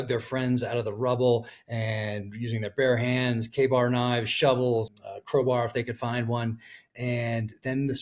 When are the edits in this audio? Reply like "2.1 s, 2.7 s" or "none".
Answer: 4.9 s